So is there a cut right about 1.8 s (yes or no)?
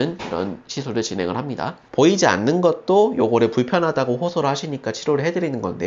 yes